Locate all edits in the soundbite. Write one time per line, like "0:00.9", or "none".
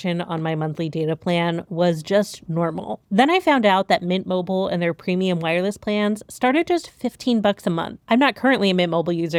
none